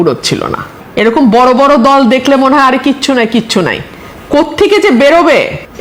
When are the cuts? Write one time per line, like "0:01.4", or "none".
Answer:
none